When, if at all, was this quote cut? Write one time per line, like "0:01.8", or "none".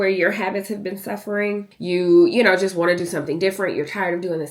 0:01.7